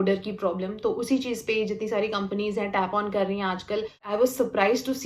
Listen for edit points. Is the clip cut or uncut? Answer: cut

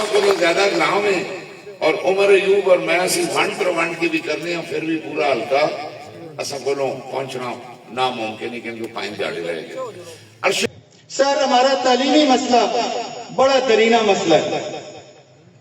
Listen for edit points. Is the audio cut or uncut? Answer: cut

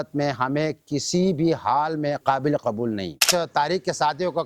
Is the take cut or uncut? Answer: cut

